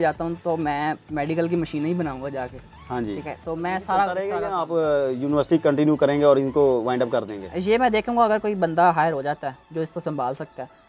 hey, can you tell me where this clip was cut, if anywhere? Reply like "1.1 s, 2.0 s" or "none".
4.5 s